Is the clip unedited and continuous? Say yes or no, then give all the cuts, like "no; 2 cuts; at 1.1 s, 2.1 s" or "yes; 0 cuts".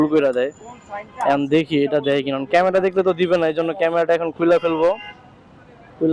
yes; 0 cuts